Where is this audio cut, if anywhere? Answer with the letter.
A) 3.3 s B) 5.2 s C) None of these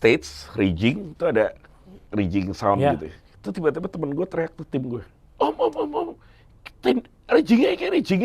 C